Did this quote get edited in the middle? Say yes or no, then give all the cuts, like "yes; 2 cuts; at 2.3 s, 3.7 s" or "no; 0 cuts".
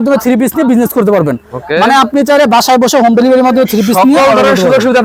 no; 0 cuts